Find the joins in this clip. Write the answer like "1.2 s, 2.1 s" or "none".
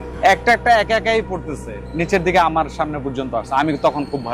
1.8 s